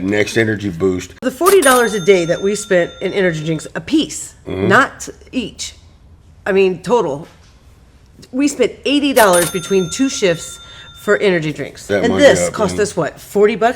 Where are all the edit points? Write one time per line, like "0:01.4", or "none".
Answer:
0:01.3
0:11.9